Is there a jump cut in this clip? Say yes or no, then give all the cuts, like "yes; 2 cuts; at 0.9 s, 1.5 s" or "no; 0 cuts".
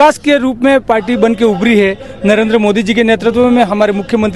no; 0 cuts